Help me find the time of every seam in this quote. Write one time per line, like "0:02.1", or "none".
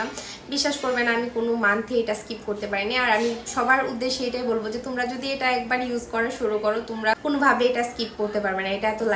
0:07.2